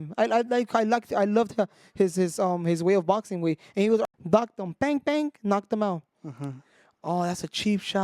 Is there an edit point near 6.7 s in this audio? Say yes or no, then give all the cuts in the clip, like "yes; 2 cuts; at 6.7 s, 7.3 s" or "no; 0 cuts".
no; 1 cut; at 4.1 s